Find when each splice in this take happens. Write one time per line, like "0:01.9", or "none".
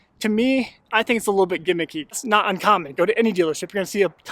0:02.2

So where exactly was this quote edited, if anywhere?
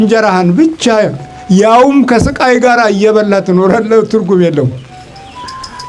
none

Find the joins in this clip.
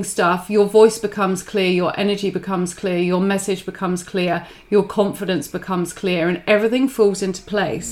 none

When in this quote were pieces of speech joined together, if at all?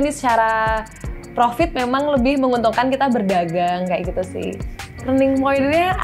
0:05.0

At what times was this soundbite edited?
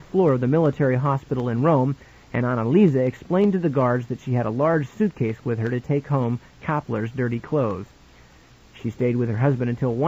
0:07.0

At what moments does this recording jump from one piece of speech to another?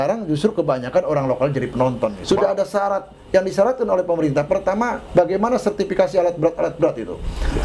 0:02.2

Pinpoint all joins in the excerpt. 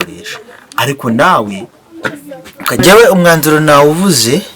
0:02.7

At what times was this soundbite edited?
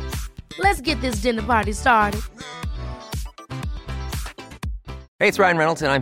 0:05.0

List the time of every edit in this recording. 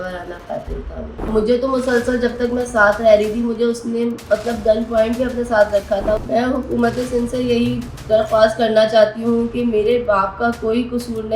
0:01.3
0:06.2

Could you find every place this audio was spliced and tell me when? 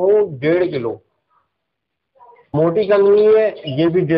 0:02.4

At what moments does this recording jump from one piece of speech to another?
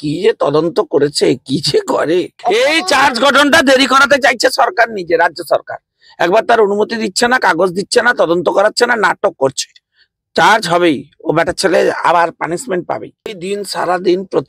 0:02.3
0:13.4

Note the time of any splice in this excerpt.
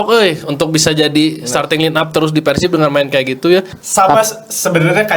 0:03.8

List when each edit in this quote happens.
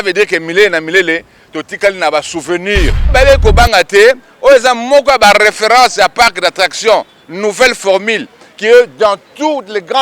0:03.1

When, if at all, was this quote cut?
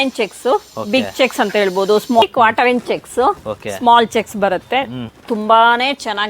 0:02.2
0:05.1

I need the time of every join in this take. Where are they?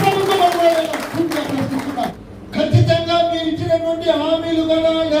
0:02.3

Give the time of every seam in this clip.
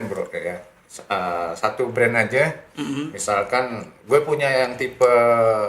0:03.9

